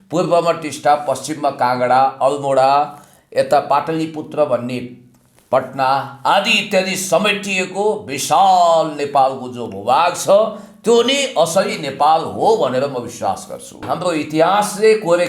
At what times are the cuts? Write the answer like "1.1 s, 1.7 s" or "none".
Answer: 13.9 s